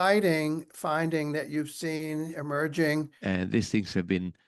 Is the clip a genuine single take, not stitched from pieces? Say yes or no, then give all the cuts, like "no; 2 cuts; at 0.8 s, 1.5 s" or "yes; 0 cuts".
no; 1 cut; at 3.1 s